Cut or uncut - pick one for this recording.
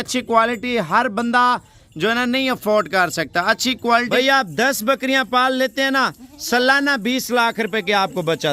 cut